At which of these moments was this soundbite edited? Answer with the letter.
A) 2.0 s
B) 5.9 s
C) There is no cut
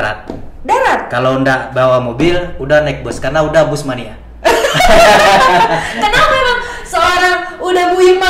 C